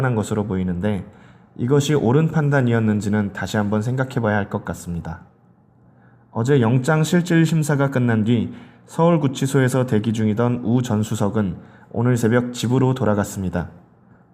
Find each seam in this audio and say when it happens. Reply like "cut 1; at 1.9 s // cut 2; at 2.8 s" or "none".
cut 1; at 11.1 s